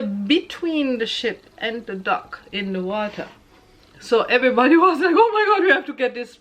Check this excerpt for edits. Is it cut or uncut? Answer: uncut